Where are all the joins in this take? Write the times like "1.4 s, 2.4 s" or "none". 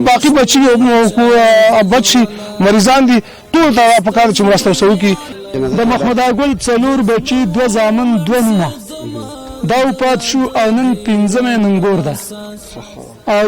5.3 s

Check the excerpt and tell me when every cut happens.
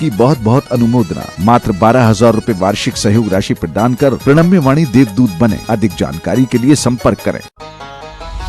7.5 s

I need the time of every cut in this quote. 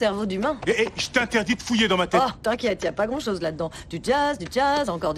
2.2 s, 3.7 s

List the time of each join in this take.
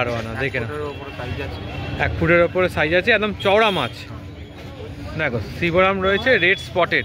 5.2 s

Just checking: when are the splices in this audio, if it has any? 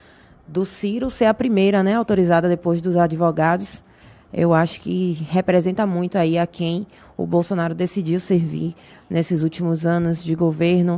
none

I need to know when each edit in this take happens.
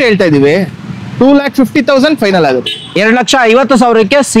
none

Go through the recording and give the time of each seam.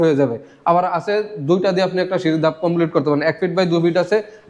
none

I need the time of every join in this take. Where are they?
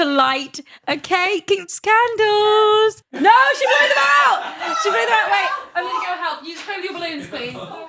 3.1 s

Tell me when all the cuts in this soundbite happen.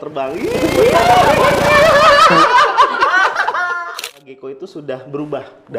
3.8 s

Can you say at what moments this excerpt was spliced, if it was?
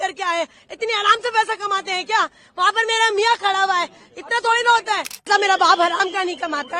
5.3 s

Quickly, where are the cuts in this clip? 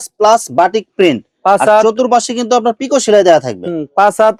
none

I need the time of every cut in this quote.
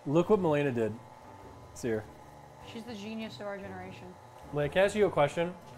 4.3 s

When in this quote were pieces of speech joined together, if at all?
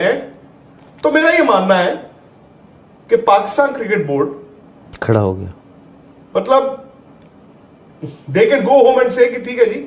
none

